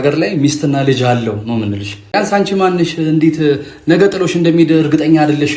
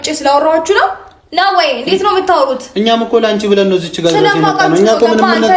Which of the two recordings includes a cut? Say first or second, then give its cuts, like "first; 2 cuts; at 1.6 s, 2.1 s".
first; 1 cut; at 2.1 s